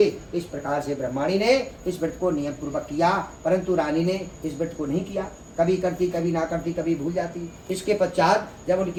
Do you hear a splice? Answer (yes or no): no